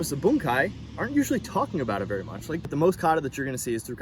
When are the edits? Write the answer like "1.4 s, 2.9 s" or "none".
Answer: 2.7 s